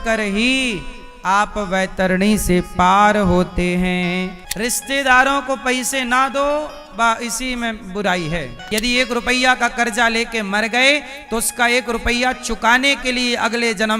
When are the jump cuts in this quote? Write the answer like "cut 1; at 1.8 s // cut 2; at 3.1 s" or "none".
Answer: cut 1; at 4.4 s // cut 2; at 8.6 s